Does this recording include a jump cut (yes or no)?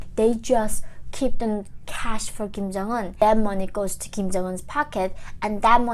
yes